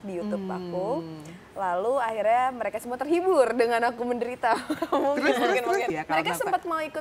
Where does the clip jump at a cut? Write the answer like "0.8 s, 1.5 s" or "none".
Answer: 5.9 s